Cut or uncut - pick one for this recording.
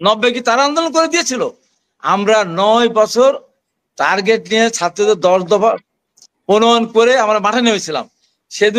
uncut